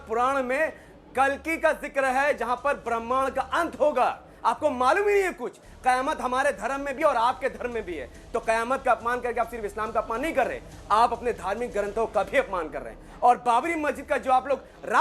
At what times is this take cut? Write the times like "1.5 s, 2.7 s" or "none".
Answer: none